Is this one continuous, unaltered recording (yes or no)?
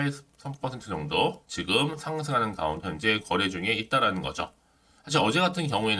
no